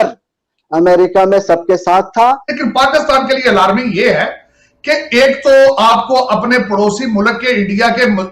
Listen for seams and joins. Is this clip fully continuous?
no; 1 cut; at 2.5 s

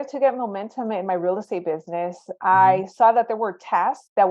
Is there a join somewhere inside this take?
no; 0 cuts

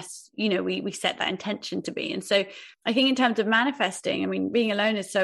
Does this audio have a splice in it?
yes; 1 cut; at 2.6 s

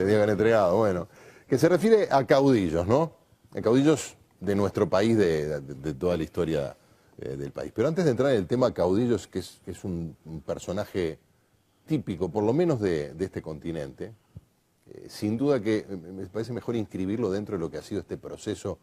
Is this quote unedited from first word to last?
no; 1 cut; at 2.5 s

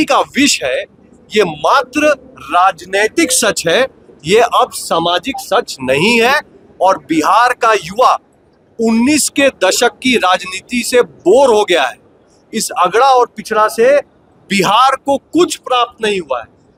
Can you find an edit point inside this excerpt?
no; 0 cuts

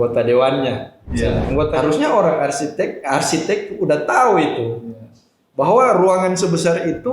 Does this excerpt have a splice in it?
yes; 1 cut; at 1.7 s

